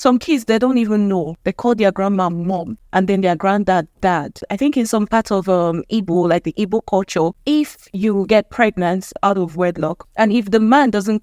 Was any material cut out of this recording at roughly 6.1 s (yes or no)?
no